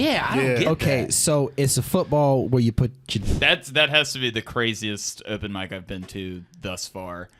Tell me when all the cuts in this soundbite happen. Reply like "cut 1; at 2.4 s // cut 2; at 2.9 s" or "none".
cut 1; at 3.1 s